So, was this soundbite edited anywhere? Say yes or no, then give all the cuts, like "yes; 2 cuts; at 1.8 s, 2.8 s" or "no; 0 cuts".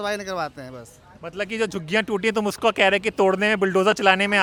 no; 0 cuts